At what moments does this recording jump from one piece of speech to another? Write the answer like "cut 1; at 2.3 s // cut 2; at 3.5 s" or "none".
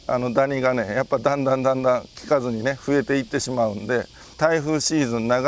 cut 1; at 4.4 s